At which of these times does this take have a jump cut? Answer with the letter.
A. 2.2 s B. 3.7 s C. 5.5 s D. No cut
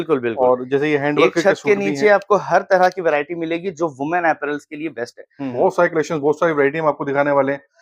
C